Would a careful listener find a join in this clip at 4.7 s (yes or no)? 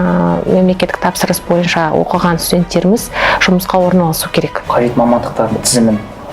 yes